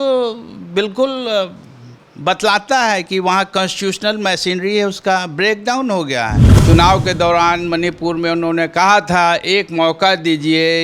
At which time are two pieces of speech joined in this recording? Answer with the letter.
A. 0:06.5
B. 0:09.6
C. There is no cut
A